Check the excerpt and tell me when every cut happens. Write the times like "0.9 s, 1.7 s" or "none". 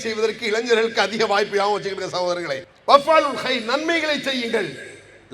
2.7 s